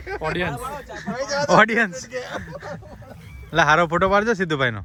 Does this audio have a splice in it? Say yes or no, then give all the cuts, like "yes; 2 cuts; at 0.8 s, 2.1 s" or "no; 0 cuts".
no; 0 cuts